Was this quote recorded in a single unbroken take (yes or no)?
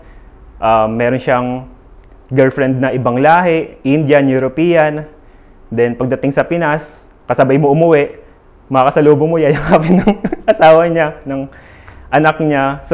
yes